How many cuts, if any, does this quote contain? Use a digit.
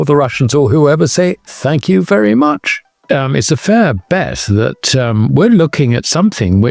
1